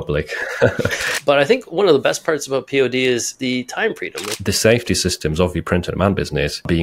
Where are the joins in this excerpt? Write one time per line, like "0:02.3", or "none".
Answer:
0:01.1
0:04.3